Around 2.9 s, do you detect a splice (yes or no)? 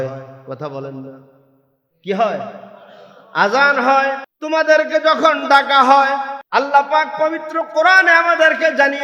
no